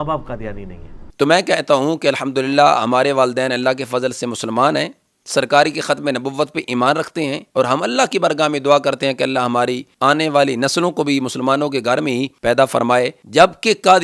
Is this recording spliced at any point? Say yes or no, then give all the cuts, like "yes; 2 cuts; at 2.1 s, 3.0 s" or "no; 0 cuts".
yes; 2 cuts; at 1.0 s, 13.2 s